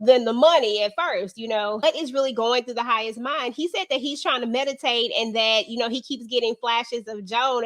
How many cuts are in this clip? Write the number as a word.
one